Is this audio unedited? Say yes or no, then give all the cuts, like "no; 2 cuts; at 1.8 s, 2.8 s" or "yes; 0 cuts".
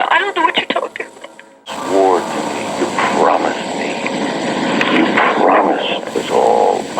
no; 1 cut; at 6.0 s